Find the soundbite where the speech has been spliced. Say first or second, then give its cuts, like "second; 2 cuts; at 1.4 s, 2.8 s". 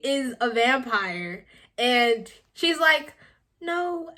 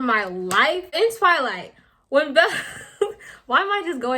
second; 1 cut; at 0.9 s